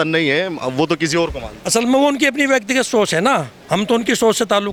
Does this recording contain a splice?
no; 0 cuts

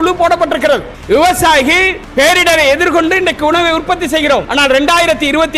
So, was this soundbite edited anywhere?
yes; 3 cuts; at 0.9 s, 2.0 s, 4.5 s

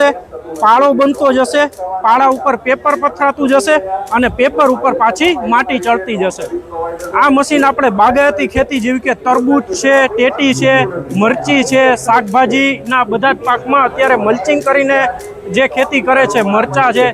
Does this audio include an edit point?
no; 0 cuts

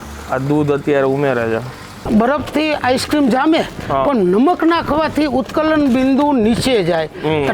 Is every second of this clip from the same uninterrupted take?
no; 1 cut; at 2.0 s

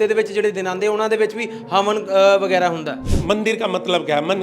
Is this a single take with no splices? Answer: no; 1 cut; at 3.1 s

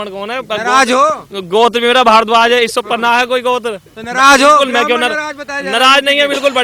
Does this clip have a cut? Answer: no; 0 cuts

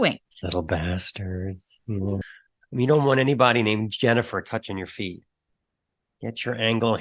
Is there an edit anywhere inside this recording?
yes; 1 cut; at 2.2 s

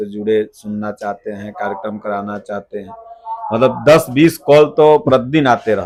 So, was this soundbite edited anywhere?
no; 0 cuts

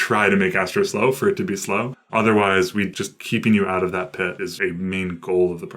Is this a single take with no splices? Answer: no; 3 cuts; at 2.0 s, 2.9 s, 4.5 s

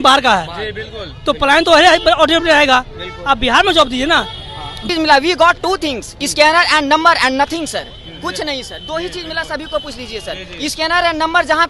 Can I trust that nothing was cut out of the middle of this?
no; 1 cut; at 4.9 s

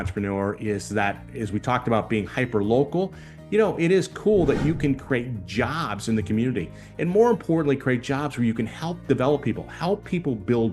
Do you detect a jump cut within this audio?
no; 0 cuts

